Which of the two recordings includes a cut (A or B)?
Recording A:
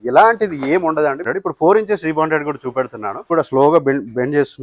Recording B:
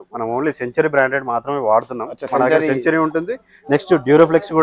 A